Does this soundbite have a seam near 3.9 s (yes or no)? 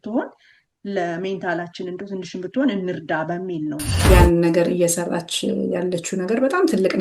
yes